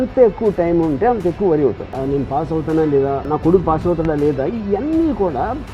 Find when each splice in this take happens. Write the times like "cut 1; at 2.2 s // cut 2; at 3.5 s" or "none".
cut 1; at 2.0 s // cut 2; at 3.2 s